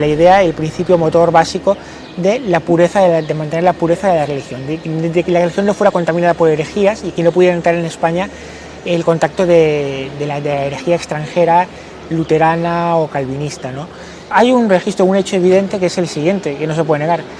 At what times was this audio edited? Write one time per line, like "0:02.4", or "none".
0:14.3